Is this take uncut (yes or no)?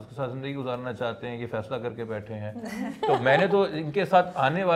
yes